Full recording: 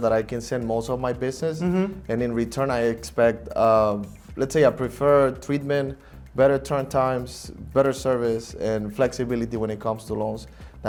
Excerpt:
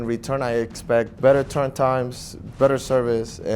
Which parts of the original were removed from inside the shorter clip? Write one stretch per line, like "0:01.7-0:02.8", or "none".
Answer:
0:03.4-0:06.3